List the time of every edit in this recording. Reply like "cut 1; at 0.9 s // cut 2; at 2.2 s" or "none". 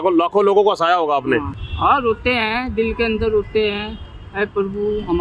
cut 1; at 1.5 s